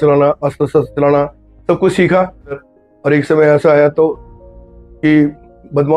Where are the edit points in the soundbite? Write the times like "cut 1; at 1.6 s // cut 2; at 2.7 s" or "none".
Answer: cut 1; at 2.6 s